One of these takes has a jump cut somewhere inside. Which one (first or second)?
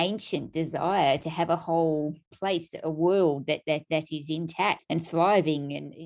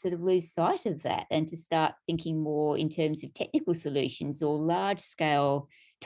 first